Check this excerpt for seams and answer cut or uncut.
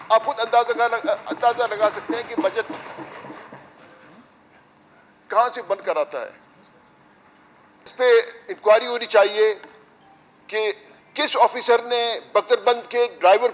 cut